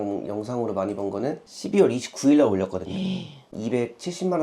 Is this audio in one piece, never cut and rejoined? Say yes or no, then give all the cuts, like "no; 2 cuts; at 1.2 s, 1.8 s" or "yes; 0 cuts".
no; 2 cuts; at 1.4 s, 3.4 s